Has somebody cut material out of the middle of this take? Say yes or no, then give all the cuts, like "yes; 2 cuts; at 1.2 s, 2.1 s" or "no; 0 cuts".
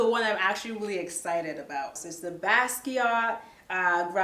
yes; 1 cut; at 1.9 s